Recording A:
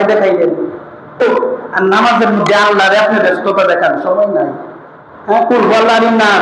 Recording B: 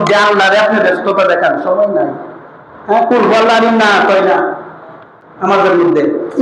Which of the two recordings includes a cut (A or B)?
A